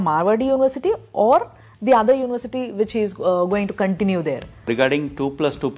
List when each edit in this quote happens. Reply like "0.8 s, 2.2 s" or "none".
4.7 s